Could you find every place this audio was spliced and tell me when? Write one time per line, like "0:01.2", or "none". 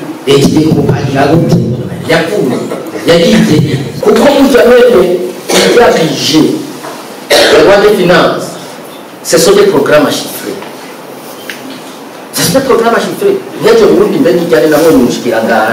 0:03.9